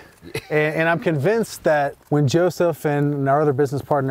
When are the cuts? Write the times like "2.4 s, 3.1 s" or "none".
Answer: 2.0 s